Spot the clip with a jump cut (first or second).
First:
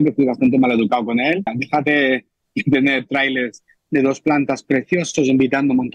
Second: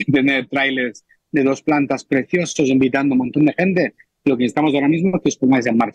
first